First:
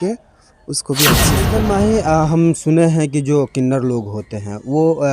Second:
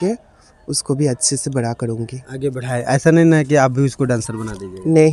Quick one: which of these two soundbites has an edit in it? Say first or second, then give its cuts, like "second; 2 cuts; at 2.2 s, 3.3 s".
first; 1 cut; at 1.3 s